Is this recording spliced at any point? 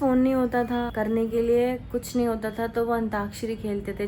no; 0 cuts

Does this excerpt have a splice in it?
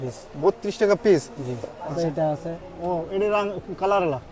yes; 1 cut; at 1.9 s

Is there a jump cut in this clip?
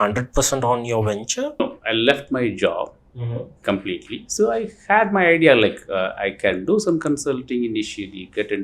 yes; 1 cut; at 1.5 s

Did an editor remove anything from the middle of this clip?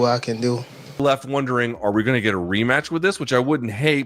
yes; 1 cut; at 1.0 s

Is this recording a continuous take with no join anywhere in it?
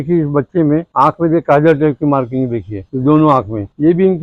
yes; 0 cuts

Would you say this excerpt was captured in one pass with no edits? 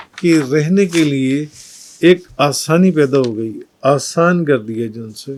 yes; 0 cuts

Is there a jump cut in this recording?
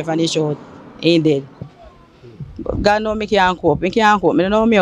no; 0 cuts

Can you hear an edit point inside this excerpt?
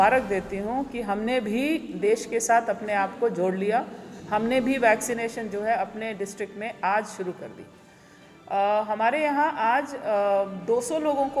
no; 0 cuts

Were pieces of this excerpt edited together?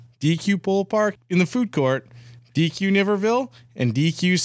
yes; 1 cut; at 1.2 s

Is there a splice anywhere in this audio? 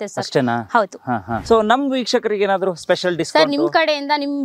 yes; 1 cut; at 1.4 s

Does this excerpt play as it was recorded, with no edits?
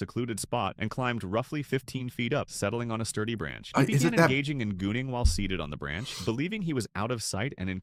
yes; 0 cuts

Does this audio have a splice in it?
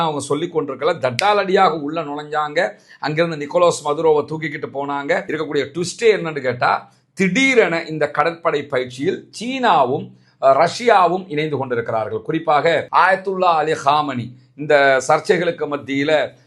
yes; 2 cuts; at 5.3 s, 12.9 s

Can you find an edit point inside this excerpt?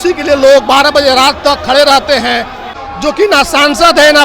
yes; 1 cut; at 2.8 s

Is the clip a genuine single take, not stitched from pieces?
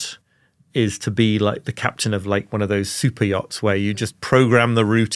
yes; 0 cuts

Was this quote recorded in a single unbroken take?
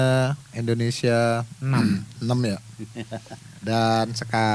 yes; 0 cuts

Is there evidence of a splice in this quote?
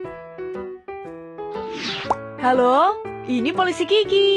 yes; 1 cut; at 2.2 s

